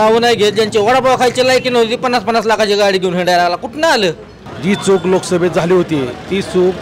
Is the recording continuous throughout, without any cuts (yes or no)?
no